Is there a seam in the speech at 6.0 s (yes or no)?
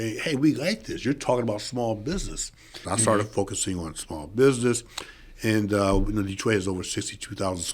no